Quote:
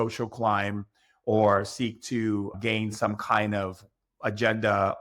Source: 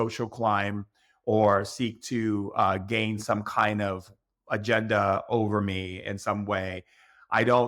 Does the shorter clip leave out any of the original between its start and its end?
yes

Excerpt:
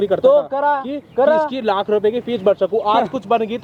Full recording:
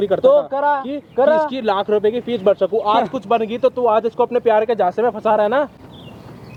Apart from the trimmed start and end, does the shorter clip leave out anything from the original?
no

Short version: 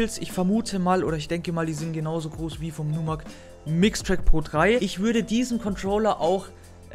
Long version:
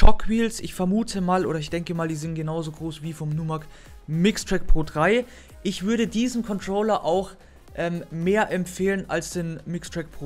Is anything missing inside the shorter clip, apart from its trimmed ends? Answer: yes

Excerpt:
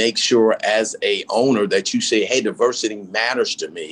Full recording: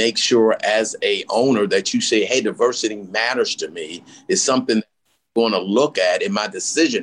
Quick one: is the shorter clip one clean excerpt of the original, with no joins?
yes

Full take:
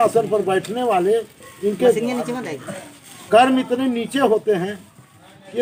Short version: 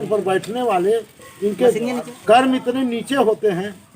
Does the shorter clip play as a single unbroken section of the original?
no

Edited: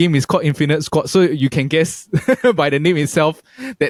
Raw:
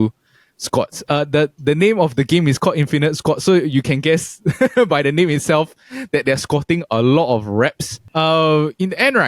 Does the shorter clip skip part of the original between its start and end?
no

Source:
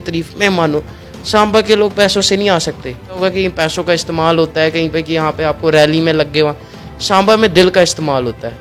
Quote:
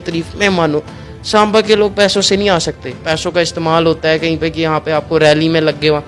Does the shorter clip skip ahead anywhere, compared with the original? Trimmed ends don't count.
yes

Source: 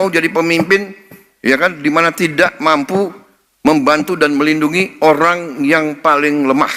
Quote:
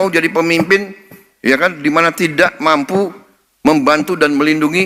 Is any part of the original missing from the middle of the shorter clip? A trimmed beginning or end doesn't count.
no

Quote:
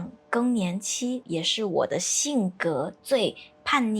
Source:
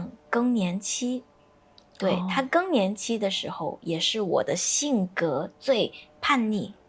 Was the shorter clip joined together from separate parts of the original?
yes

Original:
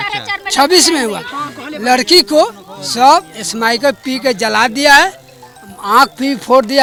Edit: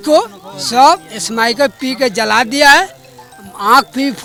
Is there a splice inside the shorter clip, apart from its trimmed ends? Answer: no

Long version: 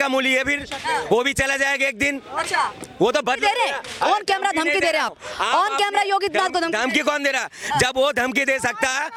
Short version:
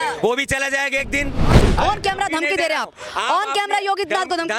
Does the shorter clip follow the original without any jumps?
no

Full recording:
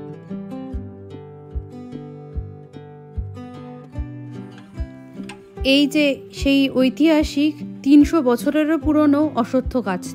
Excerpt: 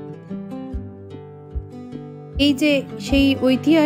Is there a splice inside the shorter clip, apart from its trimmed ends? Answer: yes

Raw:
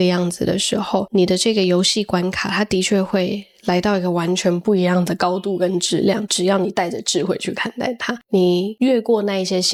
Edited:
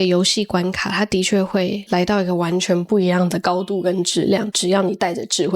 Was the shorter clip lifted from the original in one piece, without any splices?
no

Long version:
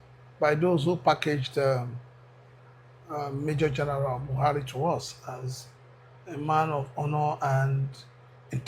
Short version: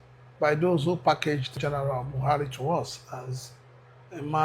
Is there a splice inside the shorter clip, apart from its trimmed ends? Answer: yes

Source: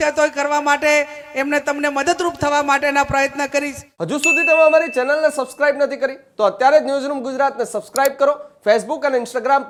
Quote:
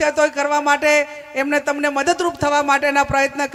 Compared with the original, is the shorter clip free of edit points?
yes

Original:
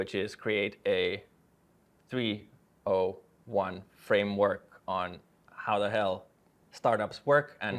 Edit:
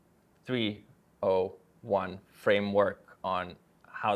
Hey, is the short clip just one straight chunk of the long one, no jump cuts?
yes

